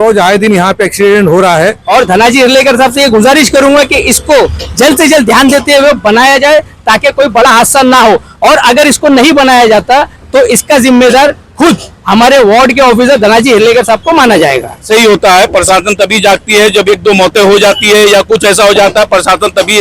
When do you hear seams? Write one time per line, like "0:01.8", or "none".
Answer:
0:01.8
0:14.8